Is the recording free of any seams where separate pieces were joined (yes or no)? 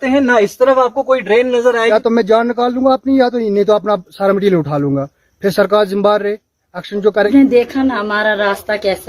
no